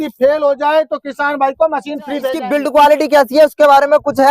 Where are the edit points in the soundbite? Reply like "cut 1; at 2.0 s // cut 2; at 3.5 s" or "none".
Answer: cut 1; at 2.4 s